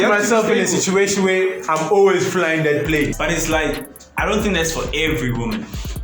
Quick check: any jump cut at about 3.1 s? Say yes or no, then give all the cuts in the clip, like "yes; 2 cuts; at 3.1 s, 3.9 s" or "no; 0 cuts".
yes; 1 cut; at 3.1 s